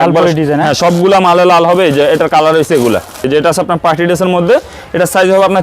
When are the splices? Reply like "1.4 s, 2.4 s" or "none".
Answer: 3.2 s